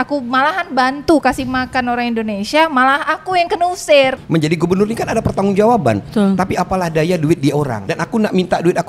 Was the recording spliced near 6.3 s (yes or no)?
no